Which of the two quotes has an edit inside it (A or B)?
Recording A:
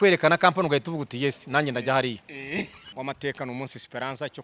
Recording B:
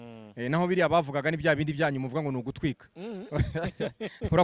A